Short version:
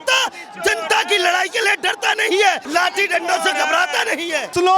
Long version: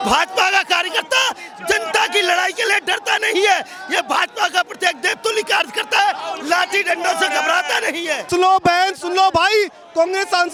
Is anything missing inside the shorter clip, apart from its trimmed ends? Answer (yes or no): yes